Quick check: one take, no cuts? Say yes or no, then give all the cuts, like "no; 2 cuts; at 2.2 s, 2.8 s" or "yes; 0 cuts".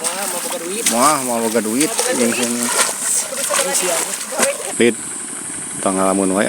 no; 1 cut; at 4.7 s